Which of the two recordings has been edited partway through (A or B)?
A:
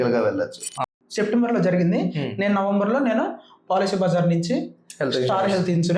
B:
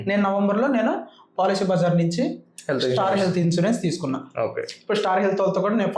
A